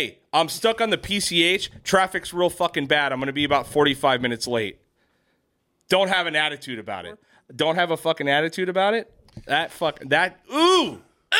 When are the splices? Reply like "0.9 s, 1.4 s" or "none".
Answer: 7.4 s